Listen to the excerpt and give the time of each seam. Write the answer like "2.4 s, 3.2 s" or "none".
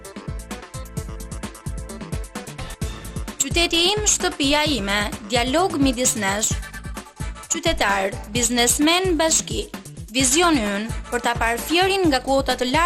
3.3 s